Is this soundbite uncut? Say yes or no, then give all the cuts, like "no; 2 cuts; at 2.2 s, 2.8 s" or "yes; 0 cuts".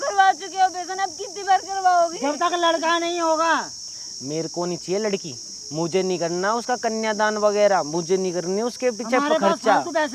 yes; 0 cuts